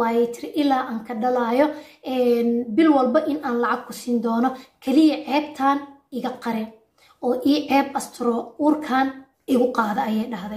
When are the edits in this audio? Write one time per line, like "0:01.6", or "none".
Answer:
0:09.3

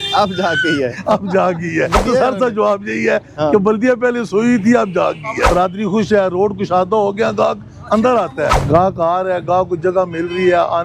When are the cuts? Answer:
0:02.0
0:05.5
0:08.6

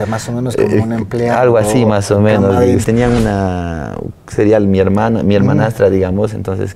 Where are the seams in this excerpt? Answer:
0:02.9

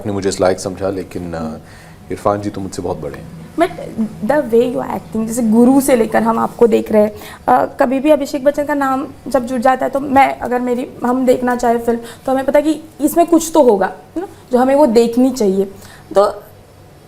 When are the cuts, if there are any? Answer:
none

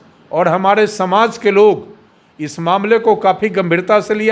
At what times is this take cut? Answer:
none

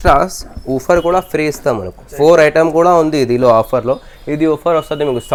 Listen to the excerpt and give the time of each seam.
none

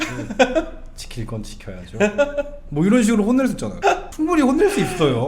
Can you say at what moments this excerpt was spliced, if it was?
none

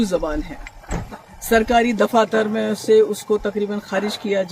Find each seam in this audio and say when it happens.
none

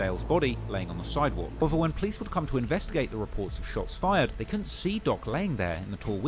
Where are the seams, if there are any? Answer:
0:01.6

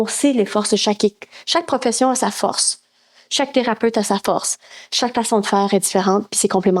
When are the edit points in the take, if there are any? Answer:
none

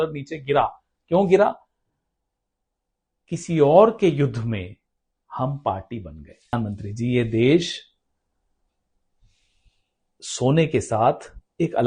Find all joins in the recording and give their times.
0:06.5

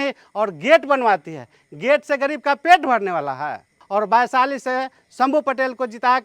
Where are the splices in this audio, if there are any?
0:03.8

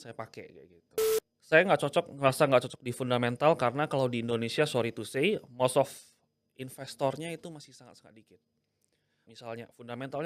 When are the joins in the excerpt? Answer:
0:01.1
0:09.3

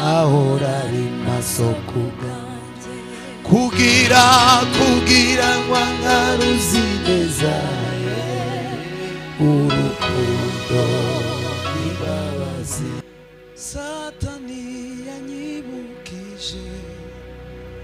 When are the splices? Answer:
0:13.0

